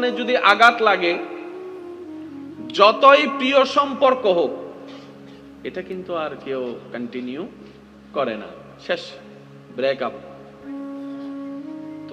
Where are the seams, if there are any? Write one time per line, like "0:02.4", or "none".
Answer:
none